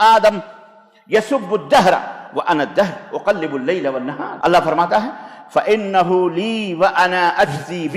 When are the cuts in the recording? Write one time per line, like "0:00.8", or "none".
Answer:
0:04.2